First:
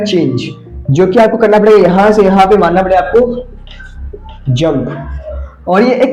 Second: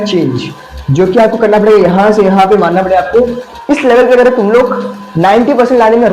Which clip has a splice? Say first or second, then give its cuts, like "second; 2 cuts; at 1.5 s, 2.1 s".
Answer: second; 1 cut; at 3.5 s